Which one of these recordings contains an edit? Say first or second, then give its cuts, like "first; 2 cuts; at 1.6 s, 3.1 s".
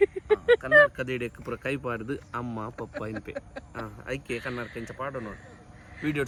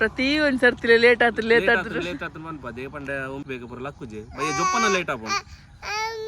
second; 1 cut; at 3.4 s